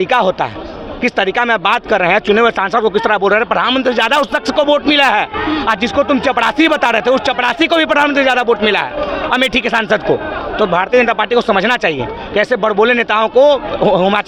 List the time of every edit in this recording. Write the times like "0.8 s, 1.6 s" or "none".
none